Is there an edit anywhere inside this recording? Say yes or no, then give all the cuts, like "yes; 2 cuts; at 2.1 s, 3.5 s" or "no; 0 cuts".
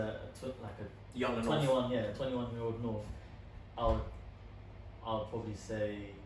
no; 0 cuts